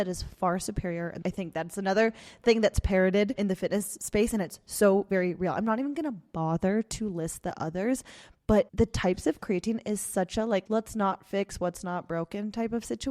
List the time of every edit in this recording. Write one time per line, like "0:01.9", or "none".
0:01.2